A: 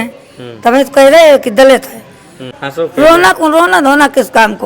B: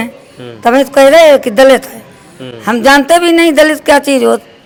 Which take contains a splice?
A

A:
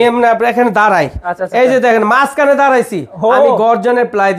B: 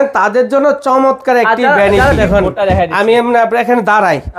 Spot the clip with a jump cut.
B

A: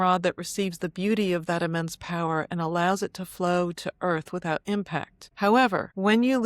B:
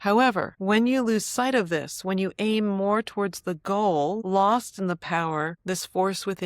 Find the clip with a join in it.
B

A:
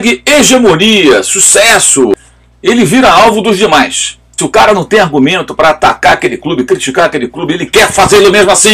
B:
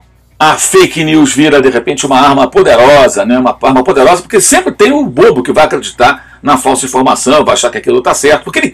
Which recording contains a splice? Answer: A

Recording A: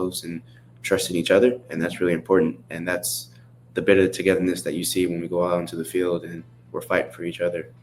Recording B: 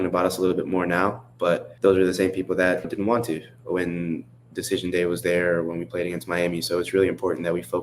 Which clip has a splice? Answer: B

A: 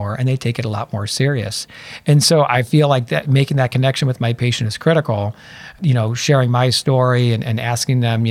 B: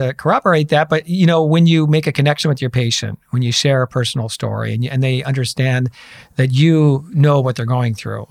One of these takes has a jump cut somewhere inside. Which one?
A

